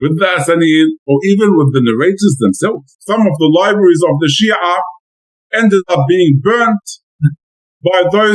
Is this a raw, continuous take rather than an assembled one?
no; 1 cut; at 3.0 s

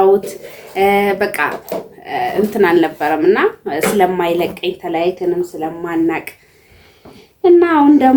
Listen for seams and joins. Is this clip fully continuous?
yes; 0 cuts

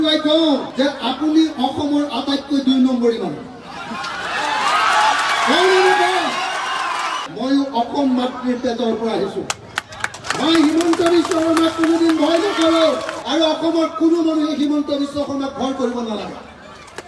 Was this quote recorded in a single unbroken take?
yes; 0 cuts

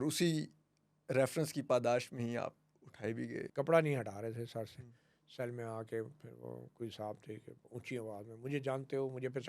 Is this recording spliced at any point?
yes; 1 cut; at 3.5 s

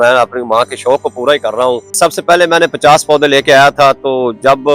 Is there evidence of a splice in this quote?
yes; 1 cut; at 2.0 s

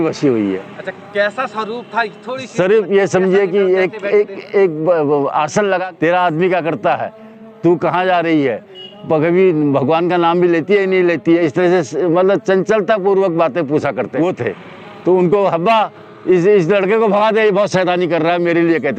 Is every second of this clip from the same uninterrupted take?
no; 2 cuts; at 5.9 s, 14.1 s

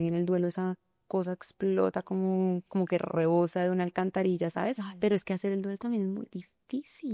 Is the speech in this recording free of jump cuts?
yes; 0 cuts

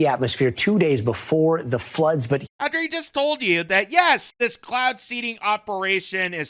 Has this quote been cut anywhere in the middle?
yes; 2 cuts; at 2.5 s, 4.3 s

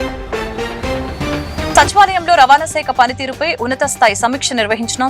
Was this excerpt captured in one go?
yes; 0 cuts

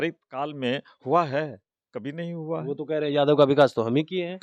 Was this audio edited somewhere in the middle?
no; 0 cuts

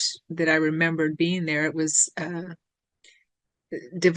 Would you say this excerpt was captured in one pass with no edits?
yes; 0 cuts

